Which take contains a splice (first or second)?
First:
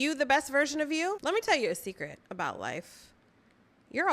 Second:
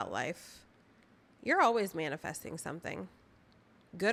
first